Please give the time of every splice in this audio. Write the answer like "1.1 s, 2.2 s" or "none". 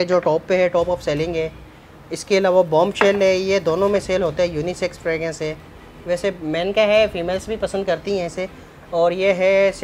none

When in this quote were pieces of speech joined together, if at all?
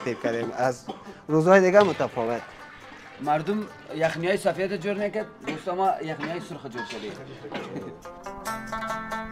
8.1 s

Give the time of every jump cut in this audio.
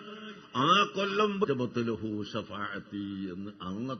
none

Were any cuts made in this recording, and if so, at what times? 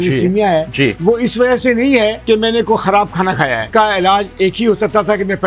2.2 s, 3.7 s

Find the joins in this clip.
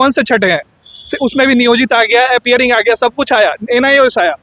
none

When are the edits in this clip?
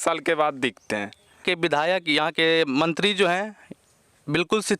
1.4 s

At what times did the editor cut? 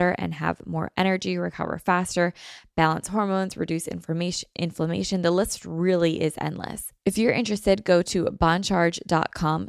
6.8 s

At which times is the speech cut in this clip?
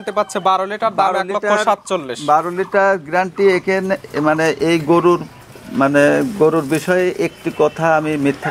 none

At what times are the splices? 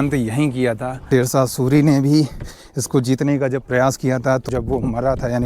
0.9 s, 4.5 s

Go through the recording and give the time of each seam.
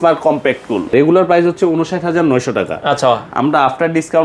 0.9 s

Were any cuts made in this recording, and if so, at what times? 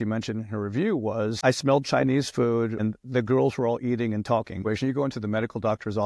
1.4 s, 2.8 s, 4.6 s

